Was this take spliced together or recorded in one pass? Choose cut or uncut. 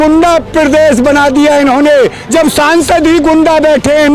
uncut